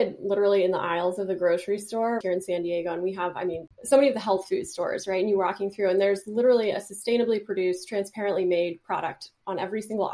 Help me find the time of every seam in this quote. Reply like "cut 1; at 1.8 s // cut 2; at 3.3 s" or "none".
cut 1; at 2.2 s // cut 2; at 3.7 s